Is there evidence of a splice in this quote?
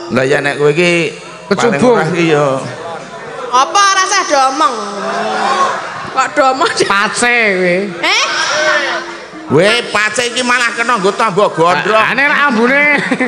no; 0 cuts

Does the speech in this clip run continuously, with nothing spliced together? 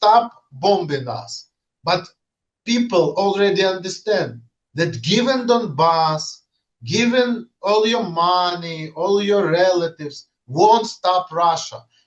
yes; 0 cuts

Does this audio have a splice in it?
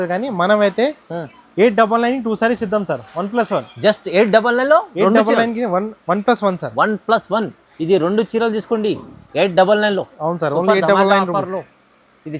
no; 0 cuts

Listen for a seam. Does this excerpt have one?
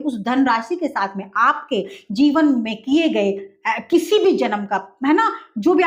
no; 0 cuts

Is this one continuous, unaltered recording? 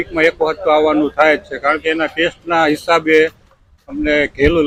yes; 0 cuts

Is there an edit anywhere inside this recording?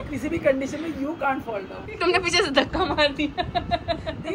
yes; 1 cut; at 1.8 s

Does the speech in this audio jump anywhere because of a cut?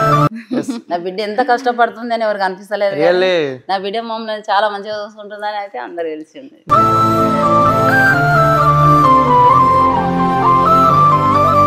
no; 0 cuts

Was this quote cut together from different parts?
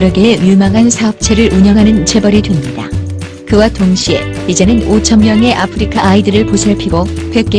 yes; 1 cut; at 4.7 s

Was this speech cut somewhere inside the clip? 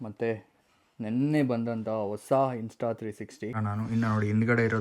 yes; 1 cut; at 3.6 s

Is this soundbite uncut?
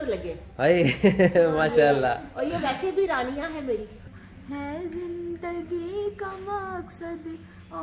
no; 1 cut; at 4.1 s

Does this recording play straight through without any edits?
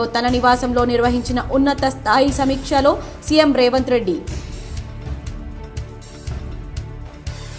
yes; 0 cuts

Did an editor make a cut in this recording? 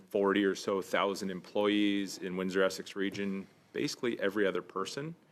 no; 0 cuts

